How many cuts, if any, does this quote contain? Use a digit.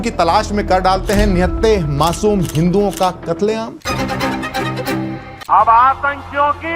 2